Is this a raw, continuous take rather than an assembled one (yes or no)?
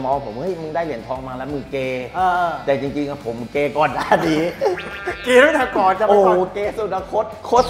yes